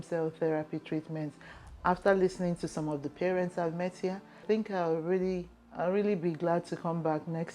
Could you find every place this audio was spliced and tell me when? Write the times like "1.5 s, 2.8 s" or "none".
4.4 s, 5.6 s